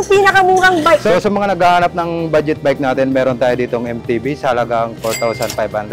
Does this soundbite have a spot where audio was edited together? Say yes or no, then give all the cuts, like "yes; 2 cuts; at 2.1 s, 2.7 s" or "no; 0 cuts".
no; 0 cuts